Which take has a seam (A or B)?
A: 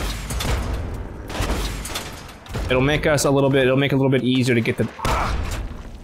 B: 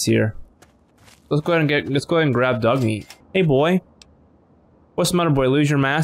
B